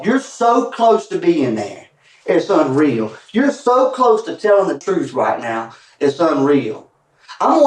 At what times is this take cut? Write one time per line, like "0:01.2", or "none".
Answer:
0:04.8